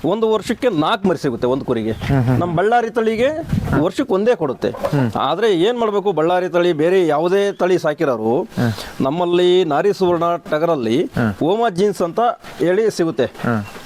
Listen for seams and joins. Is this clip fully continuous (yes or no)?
yes